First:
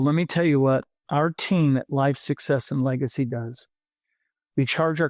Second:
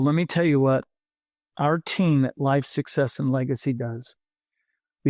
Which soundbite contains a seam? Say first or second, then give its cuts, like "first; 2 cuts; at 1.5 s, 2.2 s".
first; 1 cut; at 1.0 s